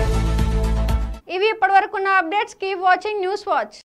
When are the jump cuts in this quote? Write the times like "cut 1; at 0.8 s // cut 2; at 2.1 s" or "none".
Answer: none